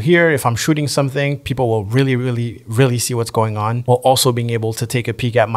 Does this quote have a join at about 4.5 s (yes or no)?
no